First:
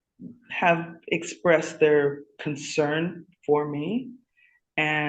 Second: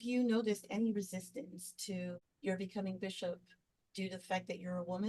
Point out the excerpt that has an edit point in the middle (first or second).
second